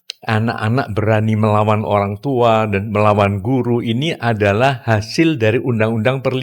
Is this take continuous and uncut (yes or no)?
yes